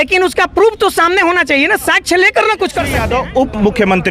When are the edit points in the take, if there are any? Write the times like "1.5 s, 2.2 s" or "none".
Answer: 3.0 s